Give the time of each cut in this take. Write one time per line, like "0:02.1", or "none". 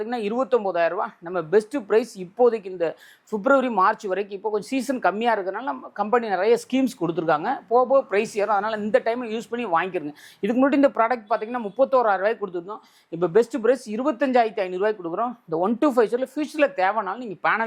none